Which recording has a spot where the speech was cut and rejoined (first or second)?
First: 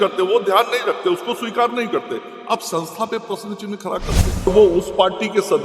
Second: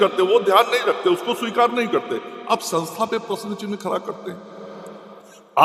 first